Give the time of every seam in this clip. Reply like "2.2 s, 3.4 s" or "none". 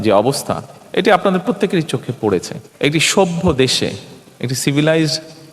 2.6 s